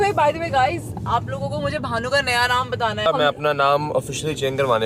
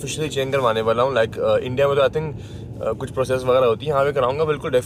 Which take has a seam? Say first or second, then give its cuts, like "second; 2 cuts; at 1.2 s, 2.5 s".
first; 1 cut; at 3.1 s